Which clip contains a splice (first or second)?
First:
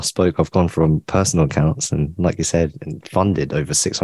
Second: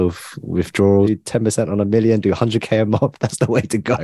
second